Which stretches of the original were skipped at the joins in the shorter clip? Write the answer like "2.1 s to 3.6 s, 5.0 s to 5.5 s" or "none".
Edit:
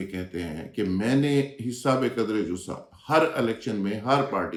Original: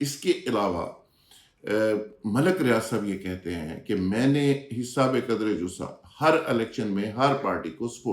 none